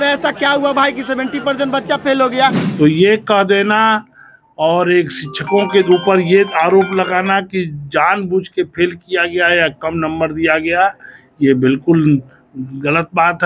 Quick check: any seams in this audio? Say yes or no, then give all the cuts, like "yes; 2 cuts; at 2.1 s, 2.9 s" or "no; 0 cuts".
yes; 1 cut; at 2.6 s